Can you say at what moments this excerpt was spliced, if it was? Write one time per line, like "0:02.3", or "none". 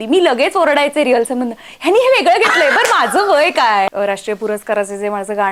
0:03.9